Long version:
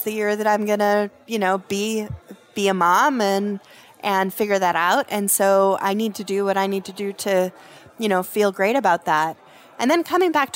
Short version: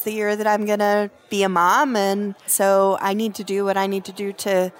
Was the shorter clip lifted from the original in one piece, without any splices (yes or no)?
no